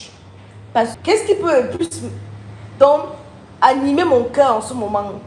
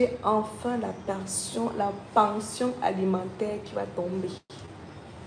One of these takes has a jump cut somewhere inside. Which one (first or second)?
first